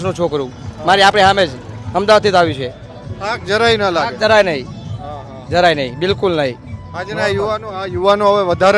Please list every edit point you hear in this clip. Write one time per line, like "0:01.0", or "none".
none